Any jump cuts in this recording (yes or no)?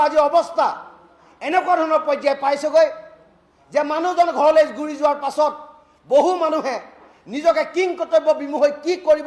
no